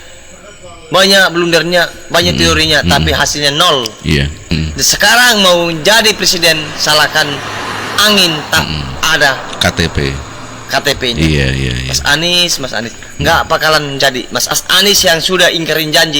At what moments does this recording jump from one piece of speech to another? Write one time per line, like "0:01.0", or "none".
0:04.4
0:14.6